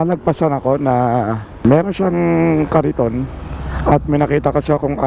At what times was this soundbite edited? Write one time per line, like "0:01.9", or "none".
0:01.6